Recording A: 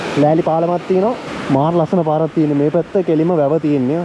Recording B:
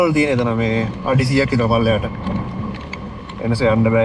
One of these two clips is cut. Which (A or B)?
A